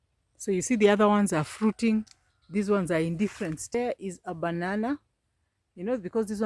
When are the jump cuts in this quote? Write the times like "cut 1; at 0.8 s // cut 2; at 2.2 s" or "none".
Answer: cut 1; at 3.7 s